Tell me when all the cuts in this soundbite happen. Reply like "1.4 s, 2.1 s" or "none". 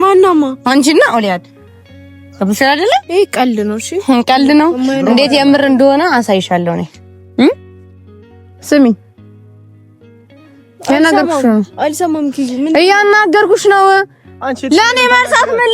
none